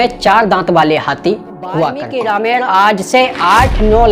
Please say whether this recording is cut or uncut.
cut